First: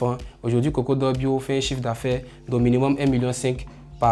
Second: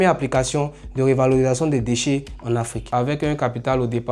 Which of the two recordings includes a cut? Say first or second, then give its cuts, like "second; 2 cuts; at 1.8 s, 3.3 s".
second; 1 cut; at 2.9 s